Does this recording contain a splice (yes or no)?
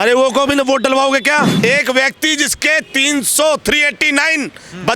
yes